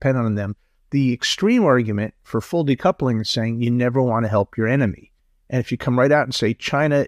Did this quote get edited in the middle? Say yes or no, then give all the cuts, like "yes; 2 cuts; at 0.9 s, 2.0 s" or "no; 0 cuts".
no; 0 cuts